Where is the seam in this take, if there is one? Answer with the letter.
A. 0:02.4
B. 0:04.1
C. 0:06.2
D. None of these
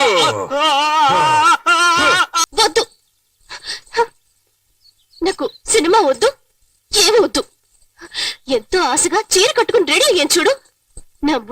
A